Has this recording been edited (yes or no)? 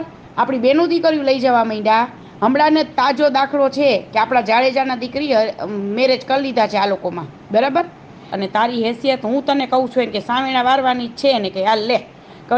yes